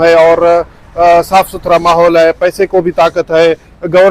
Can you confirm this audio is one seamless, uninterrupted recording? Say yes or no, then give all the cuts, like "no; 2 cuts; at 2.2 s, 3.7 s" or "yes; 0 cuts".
yes; 0 cuts